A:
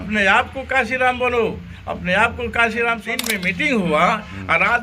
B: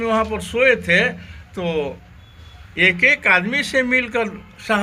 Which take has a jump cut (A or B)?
A